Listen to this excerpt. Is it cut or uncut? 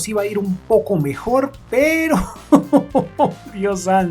uncut